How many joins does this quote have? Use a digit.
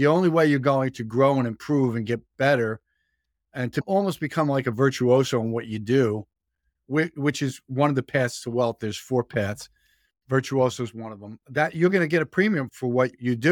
2